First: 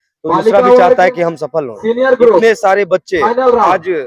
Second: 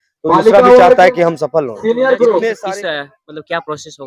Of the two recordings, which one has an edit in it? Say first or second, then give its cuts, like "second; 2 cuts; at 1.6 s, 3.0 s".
second; 1 cut; at 2.6 s